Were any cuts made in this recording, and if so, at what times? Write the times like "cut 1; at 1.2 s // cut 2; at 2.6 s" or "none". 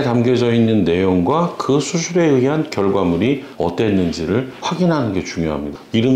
none